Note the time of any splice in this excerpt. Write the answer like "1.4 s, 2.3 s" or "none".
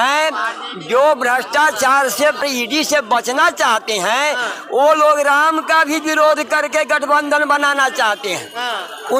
none